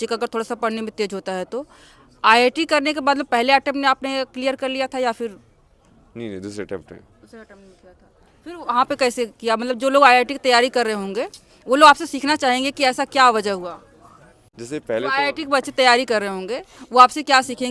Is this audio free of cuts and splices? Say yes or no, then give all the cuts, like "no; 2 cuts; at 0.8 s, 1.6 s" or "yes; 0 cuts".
yes; 0 cuts